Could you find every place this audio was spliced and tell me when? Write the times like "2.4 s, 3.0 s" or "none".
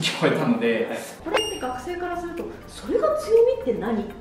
1.1 s